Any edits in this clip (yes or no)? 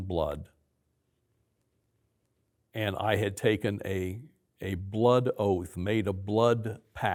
no